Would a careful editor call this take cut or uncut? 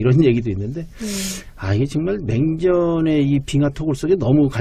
cut